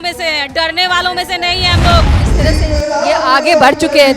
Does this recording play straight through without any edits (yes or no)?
no